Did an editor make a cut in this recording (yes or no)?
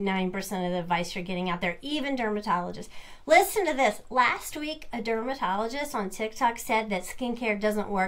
no